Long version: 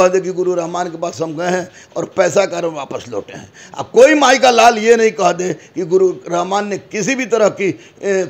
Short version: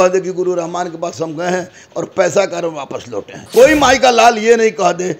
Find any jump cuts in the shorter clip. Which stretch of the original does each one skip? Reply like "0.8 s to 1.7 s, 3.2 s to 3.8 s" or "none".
3.4 s to 3.8 s